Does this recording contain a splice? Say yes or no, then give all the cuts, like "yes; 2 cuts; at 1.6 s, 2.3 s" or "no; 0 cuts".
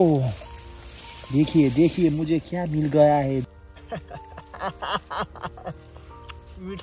yes; 1 cut; at 3.5 s